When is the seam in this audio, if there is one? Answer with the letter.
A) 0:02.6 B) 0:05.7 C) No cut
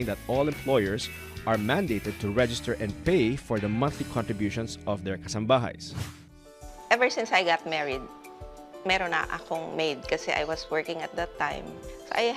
B